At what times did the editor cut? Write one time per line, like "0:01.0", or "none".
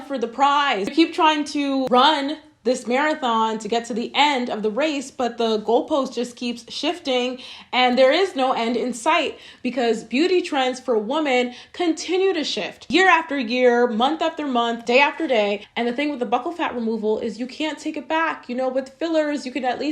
0:00.9